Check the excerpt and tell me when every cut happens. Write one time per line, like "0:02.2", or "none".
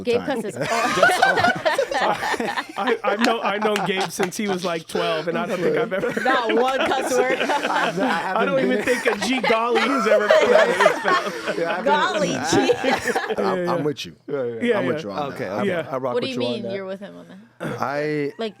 0:13.4